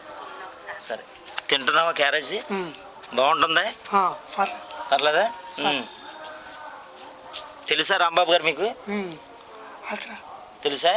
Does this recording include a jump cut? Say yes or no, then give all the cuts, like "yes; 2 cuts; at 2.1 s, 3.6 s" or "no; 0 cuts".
no; 0 cuts